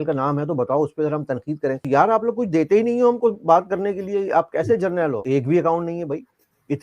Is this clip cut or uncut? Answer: cut